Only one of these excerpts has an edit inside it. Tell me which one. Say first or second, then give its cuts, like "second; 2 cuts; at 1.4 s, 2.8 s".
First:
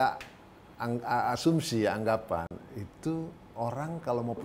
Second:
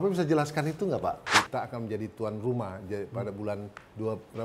second; 1 cut; at 1.3 s